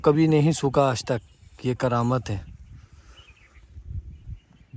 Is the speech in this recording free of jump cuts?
yes; 0 cuts

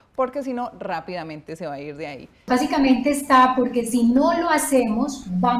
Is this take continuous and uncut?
no; 1 cut; at 2.5 s

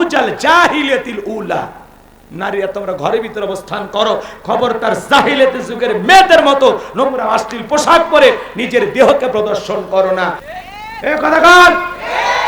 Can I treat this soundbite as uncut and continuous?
no; 1 cut; at 10.5 s

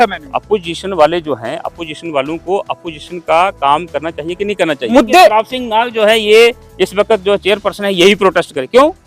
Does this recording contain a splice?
yes; 1 cut; at 4.9 s

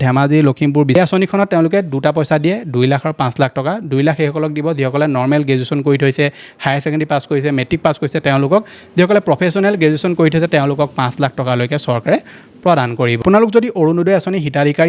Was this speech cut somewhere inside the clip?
yes; 2 cuts; at 0.9 s, 13.2 s

